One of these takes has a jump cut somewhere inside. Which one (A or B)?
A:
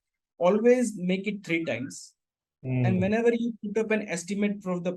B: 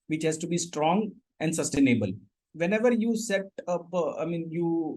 B